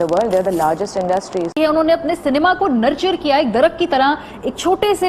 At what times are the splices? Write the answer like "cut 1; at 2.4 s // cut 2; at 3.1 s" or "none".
cut 1; at 1.6 s